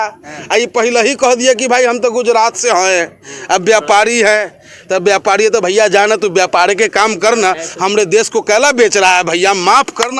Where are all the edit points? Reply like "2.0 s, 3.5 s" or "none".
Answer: none